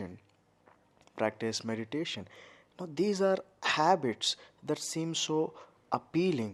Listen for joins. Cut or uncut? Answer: uncut